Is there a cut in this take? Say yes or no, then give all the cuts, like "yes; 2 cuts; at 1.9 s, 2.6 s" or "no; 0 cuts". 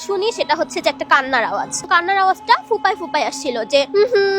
yes; 1 cut; at 1.8 s